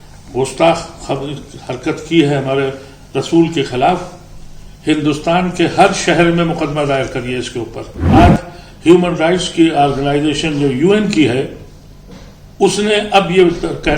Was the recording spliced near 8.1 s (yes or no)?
yes